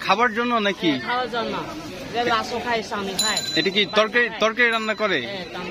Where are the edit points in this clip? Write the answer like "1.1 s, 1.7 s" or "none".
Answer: none

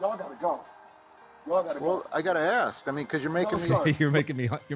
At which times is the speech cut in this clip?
none

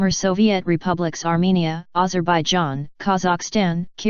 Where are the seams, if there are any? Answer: none

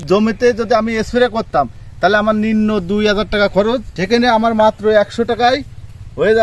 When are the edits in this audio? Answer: 3.9 s

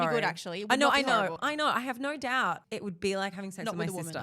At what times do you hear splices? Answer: 1.4 s, 2.6 s

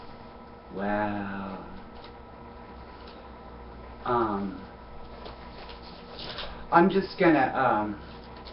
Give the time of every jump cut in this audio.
3.8 s

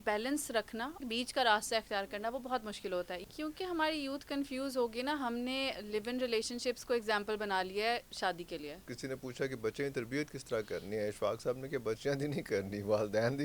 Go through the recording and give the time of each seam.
1.0 s, 3.2 s, 8.9 s

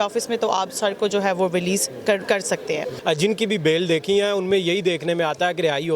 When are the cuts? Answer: 2.9 s

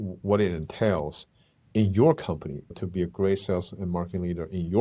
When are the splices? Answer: 2.7 s

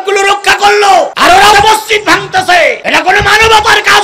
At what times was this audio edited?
1.4 s, 2.8 s

